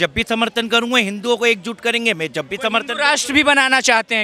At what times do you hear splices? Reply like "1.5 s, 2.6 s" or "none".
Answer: none

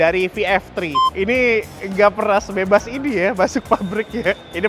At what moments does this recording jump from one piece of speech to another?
1.0 s

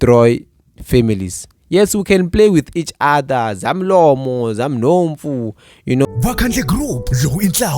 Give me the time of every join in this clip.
6.1 s

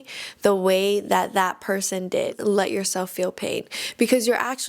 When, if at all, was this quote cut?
2.3 s

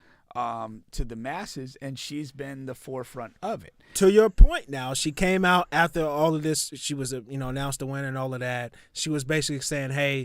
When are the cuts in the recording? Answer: 3.9 s

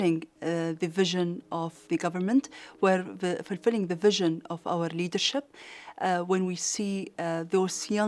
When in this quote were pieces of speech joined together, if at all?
1.8 s

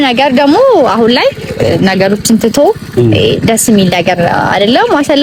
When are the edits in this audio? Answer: none

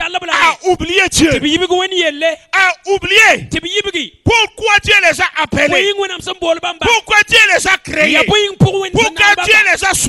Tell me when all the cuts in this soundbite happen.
none

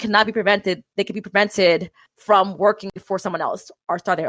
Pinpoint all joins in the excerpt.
2.1 s

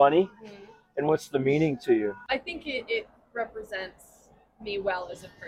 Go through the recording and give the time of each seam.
2.2 s

